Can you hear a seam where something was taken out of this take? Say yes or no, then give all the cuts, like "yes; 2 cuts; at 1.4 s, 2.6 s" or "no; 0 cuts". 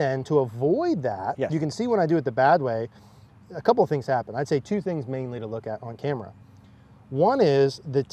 no; 0 cuts